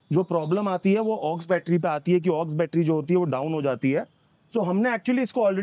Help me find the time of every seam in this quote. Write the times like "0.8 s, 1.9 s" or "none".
none